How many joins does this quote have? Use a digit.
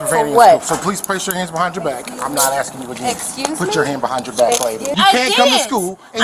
1